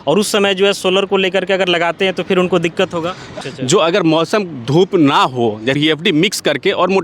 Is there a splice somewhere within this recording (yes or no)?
yes